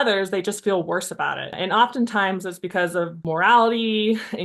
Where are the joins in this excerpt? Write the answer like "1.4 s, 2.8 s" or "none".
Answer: 1.5 s, 3.2 s